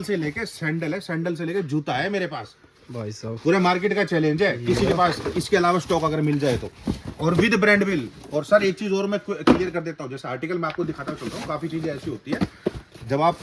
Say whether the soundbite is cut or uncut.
uncut